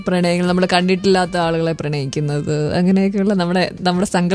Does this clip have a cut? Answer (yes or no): no